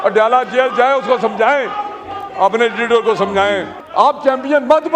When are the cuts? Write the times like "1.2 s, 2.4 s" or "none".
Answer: 3.8 s